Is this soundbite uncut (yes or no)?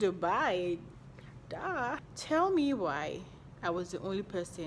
no